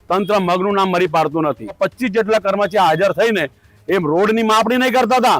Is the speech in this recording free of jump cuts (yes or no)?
no